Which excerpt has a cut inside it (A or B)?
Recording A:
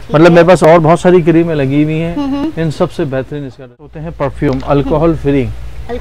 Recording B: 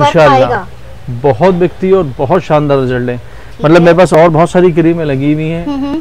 A